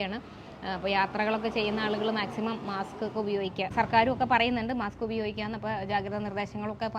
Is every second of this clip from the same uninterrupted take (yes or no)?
no